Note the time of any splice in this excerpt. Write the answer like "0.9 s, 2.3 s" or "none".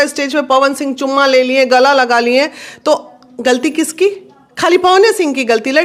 none